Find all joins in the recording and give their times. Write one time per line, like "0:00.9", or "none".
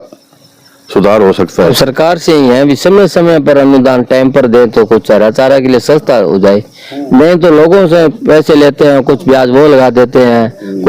0:01.8